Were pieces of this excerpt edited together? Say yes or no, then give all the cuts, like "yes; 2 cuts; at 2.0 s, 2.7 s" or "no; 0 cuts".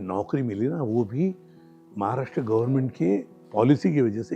no; 0 cuts